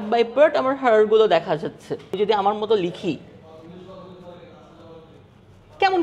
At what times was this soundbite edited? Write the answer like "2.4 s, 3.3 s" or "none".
2.2 s

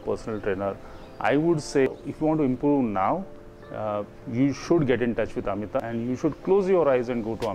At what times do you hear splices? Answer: 1.9 s

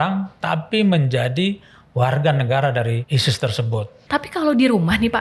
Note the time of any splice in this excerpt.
3.0 s, 3.9 s

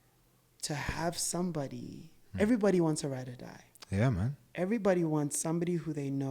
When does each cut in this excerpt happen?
none

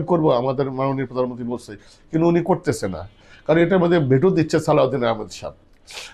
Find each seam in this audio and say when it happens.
none

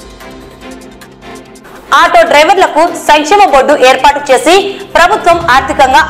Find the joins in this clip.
1.6 s

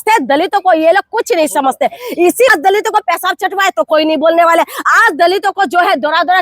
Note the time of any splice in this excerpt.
2.5 s

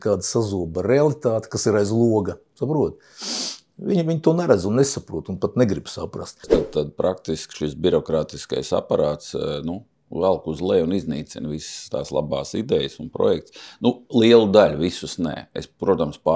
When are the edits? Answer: 6.6 s

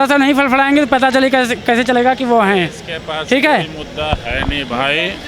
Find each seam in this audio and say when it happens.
none

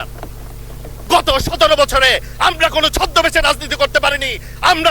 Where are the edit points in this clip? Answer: 0.9 s

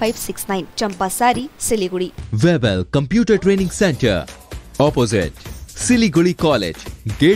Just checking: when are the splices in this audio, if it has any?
2.2 s

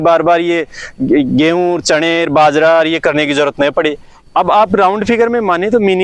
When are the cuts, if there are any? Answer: 4.1 s

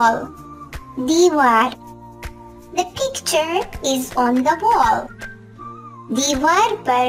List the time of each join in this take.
none

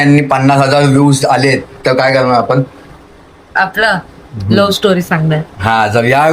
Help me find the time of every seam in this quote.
none

